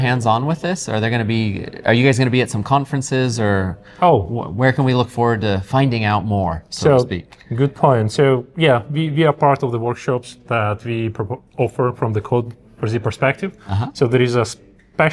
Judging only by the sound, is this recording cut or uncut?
uncut